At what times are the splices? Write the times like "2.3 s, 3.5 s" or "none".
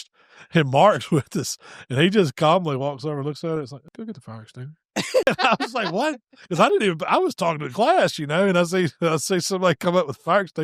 3.9 s, 5.2 s

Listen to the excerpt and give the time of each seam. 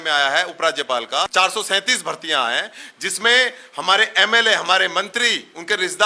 1.3 s

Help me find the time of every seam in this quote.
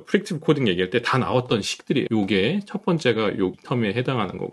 2.1 s, 3.6 s

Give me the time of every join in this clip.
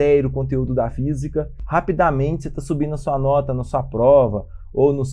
1.6 s

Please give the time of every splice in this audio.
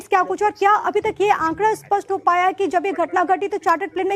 3.1 s

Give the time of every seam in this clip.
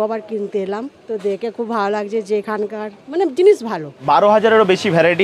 0.9 s, 3.9 s

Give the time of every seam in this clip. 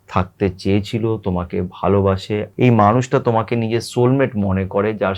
2.5 s

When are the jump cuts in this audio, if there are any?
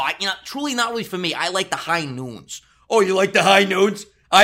none

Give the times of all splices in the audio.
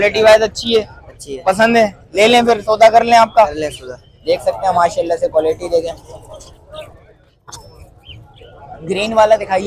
none

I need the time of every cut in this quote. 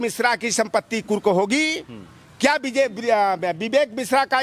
none

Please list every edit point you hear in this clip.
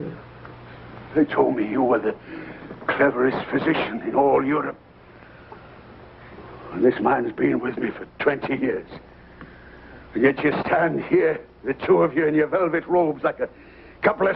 6.5 s

